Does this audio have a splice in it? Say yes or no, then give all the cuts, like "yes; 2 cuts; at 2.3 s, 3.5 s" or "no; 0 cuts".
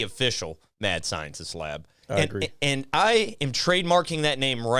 no; 0 cuts